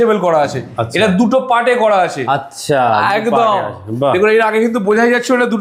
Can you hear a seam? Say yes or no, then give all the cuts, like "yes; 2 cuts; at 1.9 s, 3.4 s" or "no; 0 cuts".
no; 0 cuts